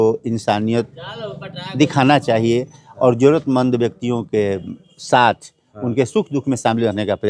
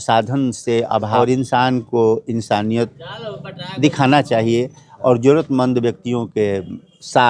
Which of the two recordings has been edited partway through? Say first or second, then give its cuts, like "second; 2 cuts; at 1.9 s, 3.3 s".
second; 1 cut; at 1.1 s